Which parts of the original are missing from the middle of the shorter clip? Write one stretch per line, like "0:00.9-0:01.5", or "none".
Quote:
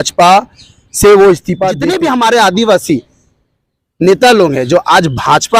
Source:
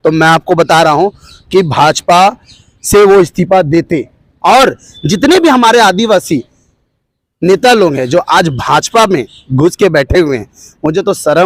0:03.6-0:05.1